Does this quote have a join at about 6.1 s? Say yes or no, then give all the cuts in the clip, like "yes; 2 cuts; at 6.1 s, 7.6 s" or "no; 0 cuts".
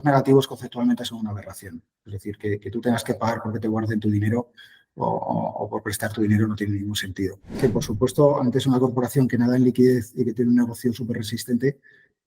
no; 1 cut; at 7.5 s